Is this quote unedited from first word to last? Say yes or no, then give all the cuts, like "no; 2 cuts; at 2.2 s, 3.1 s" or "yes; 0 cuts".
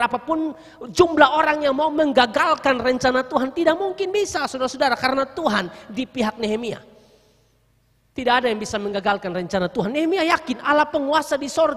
yes; 0 cuts